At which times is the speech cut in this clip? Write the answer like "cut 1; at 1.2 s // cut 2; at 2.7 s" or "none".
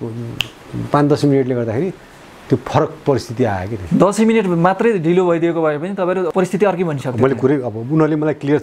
cut 1; at 6.3 s